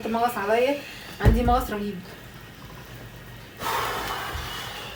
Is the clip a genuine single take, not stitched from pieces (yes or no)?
yes